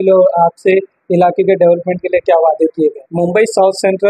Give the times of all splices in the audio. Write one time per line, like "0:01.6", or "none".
0:03.0